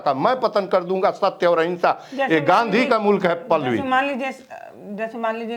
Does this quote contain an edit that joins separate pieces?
no; 0 cuts

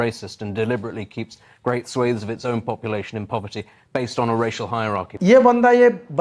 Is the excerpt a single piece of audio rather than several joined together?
yes; 0 cuts

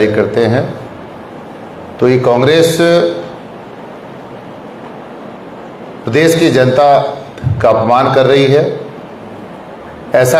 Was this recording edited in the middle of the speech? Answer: no; 0 cuts

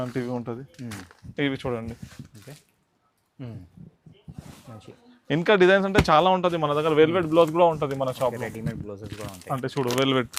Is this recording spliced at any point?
no; 0 cuts

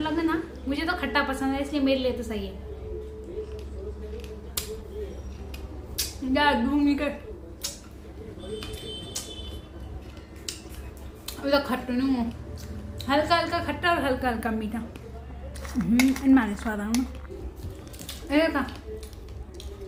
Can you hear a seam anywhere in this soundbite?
no; 0 cuts

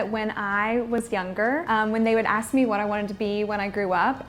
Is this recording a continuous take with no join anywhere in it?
no; 1 cut; at 1.6 s

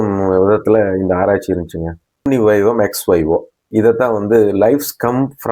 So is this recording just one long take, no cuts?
no; 1 cut; at 2.2 s

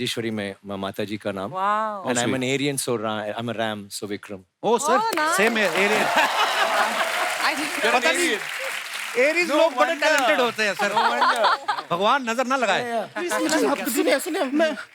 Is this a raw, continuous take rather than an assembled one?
no; 1 cut; at 13.3 s

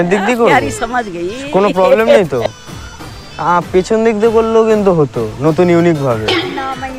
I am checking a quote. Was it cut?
no; 0 cuts

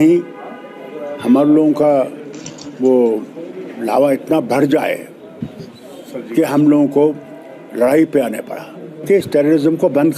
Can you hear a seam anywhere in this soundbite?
yes; 1 cut; at 9.0 s

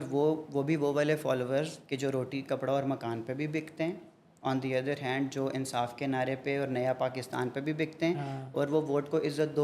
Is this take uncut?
yes; 0 cuts

